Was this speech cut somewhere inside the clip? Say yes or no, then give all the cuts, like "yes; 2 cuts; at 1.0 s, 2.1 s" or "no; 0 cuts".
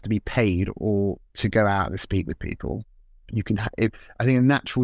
yes; 1 cut; at 2.9 s